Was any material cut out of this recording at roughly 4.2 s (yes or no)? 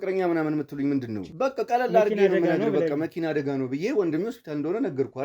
no